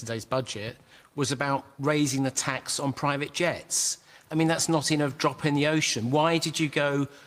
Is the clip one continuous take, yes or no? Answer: no